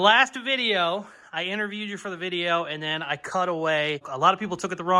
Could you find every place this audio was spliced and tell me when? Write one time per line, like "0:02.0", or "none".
0:04.1

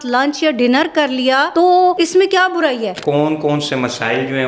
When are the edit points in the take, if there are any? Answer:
0:01.8
0:03.0

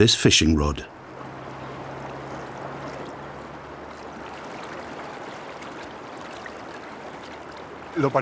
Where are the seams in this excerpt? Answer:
0:07.3

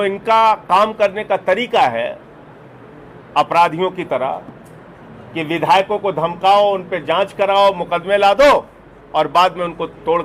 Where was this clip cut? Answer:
none

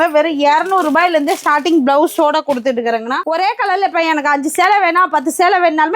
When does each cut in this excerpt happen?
0:03.2

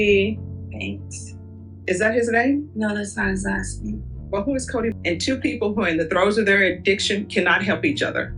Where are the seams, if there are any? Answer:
0:04.9

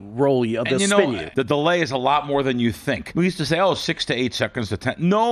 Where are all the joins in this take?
0:01.2
0:03.1

